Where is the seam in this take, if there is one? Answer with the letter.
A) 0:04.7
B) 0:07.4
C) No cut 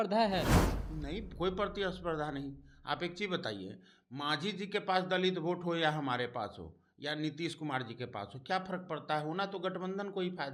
C